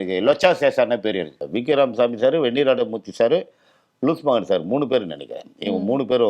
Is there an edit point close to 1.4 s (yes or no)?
yes